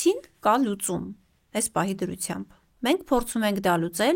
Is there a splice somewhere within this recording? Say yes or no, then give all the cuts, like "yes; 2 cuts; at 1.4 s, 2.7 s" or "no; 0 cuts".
no; 0 cuts